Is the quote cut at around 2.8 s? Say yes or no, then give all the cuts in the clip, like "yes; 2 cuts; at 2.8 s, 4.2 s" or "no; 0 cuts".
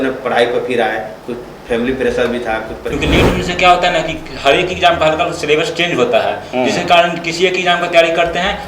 yes; 1 cut; at 2.8 s